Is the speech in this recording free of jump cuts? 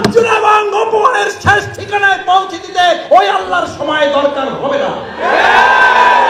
yes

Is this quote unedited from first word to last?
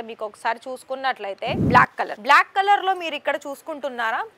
no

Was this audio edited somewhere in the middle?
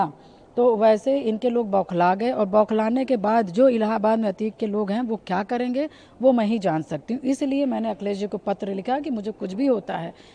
no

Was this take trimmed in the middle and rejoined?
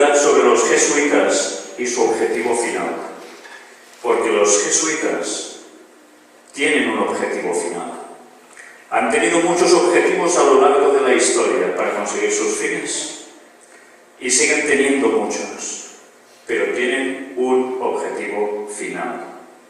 yes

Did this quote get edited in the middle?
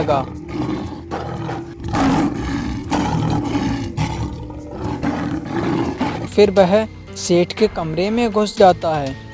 yes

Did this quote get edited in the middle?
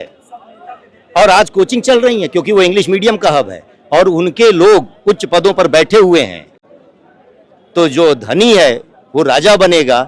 no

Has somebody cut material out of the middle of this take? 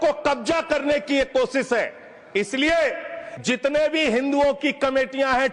yes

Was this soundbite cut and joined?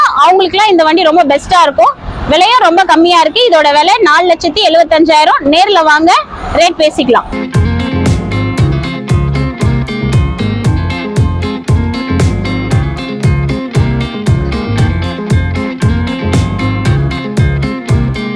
no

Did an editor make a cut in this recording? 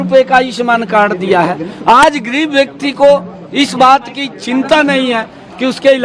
no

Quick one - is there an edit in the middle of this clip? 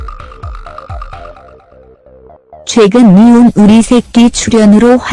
yes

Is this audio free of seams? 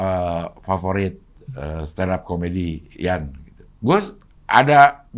yes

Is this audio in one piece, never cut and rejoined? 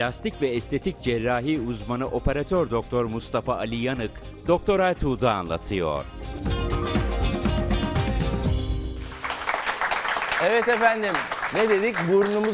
yes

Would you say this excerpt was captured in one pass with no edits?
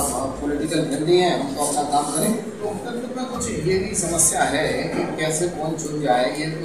no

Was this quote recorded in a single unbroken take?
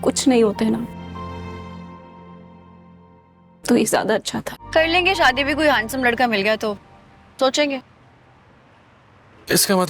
no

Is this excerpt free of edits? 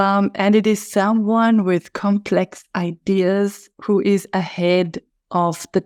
yes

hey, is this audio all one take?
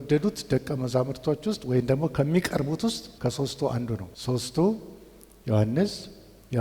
no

